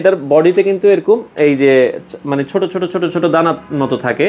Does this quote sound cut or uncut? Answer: uncut